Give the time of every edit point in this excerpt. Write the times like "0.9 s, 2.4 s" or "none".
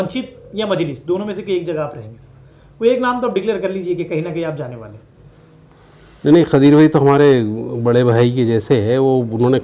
none